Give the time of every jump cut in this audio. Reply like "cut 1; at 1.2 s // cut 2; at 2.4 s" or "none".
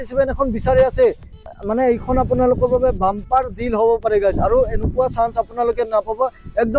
cut 1; at 1.4 s